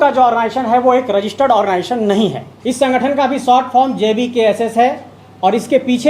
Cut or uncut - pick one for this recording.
cut